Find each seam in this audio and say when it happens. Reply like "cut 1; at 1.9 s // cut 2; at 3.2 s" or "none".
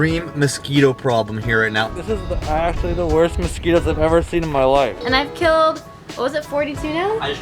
cut 1; at 1.9 s // cut 2; at 5.0 s